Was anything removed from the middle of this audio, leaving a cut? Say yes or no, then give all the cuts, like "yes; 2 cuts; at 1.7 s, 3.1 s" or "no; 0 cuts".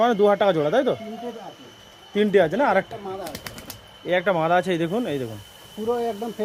no; 0 cuts